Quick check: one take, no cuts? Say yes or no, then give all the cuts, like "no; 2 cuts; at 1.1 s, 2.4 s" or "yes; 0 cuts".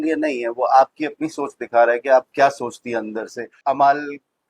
no; 1 cut; at 3.6 s